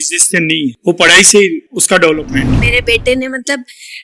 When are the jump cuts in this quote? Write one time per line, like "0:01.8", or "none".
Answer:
0:00.8
0:02.2

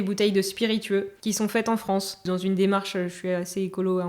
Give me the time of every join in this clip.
0:01.1
0:02.2

